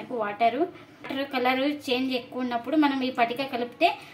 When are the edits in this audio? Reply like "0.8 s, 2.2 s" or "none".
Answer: 1.1 s